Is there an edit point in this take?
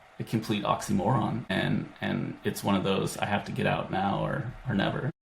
yes; 1 cut; at 1.5 s

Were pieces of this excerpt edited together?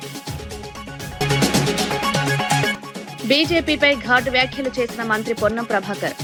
no; 0 cuts

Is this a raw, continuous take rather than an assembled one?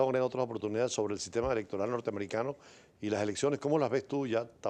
yes; 0 cuts

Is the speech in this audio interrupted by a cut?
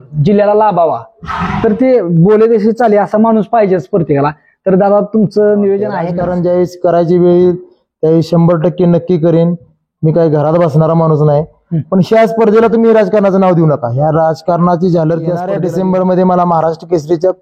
yes; 2 cuts; at 6.1 s, 15.5 s

